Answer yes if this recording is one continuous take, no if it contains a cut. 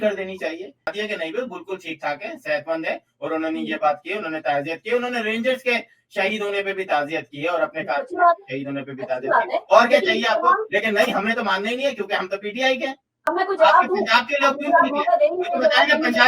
no